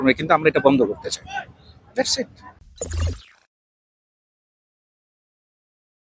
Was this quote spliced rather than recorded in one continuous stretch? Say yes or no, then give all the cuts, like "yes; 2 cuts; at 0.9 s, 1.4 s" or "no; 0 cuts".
no; 0 cuts